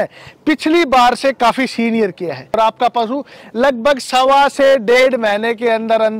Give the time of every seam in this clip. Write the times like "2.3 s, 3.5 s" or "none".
2.6 s